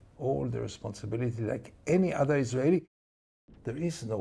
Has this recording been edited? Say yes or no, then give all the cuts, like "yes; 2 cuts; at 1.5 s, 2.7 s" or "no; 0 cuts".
yes; 1 cut; at 2.9 s